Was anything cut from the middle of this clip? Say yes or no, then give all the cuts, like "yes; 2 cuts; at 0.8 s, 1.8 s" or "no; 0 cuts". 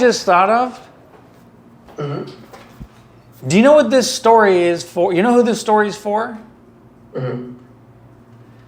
no; 0 cuts